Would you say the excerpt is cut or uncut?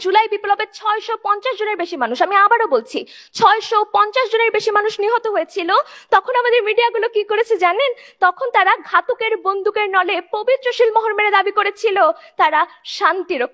uncut